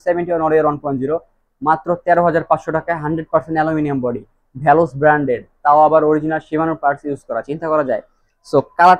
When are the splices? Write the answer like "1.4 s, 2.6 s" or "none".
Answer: none